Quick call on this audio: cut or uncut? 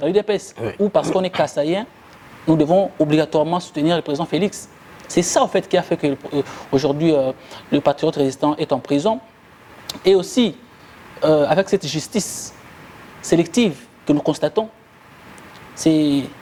uncut